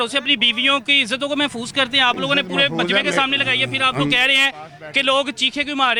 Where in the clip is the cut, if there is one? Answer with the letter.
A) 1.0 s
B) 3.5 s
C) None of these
C